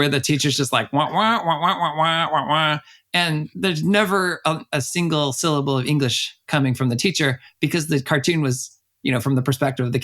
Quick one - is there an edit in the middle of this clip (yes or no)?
no